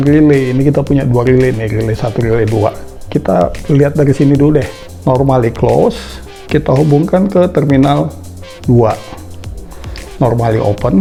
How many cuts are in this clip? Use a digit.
0